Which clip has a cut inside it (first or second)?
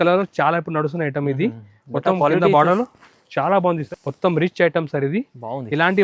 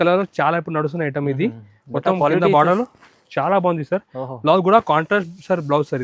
first